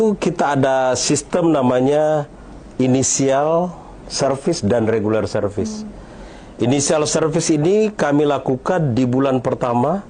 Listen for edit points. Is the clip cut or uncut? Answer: uncut